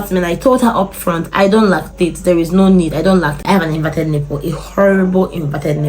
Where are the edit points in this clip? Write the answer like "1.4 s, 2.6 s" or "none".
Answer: 3.3 s